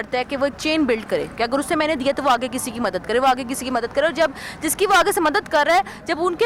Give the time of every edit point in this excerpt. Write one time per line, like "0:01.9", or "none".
none

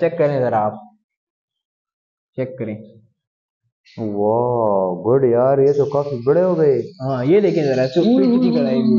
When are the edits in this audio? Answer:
none

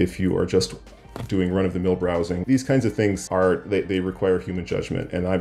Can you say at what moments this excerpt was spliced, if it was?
0:02.4
0:03.2

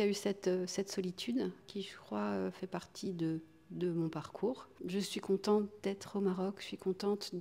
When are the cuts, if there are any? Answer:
0:01.6
0:04.7

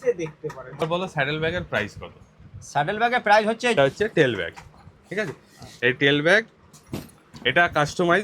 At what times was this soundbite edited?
0:00.8
0:03.7

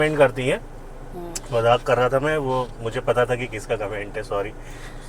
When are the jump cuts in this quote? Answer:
none

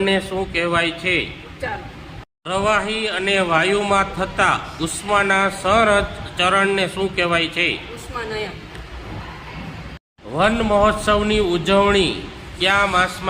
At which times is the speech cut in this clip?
0:10.0

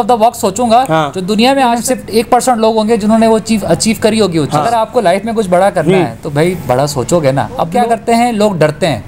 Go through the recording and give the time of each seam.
0:01.6
0:04.9
0:07.8

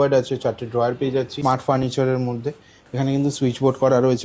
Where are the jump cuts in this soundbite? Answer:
0:01.8

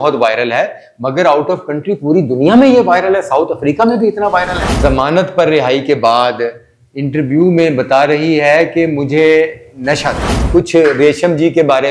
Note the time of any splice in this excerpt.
0:04.6
0:10.3

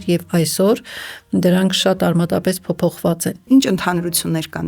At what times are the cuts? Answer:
0:03.5

